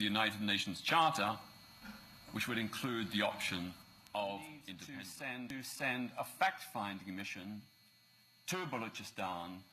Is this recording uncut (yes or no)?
no